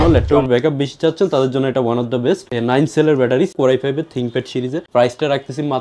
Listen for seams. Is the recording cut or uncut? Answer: cut